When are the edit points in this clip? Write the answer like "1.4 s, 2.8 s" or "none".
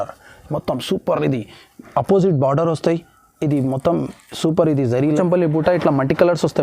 5.2 s